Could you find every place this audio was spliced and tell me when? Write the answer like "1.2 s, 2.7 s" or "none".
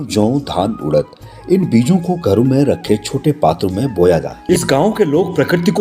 4.3 s